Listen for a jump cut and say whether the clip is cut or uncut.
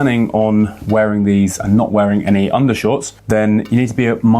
cut